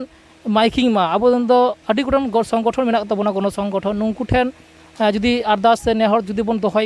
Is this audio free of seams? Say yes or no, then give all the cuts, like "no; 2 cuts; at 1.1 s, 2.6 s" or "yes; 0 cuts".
yes; 0 cuts